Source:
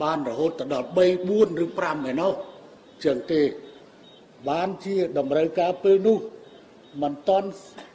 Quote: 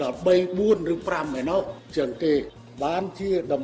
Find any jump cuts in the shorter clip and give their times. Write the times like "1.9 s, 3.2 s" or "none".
1.8 s, 2.6 s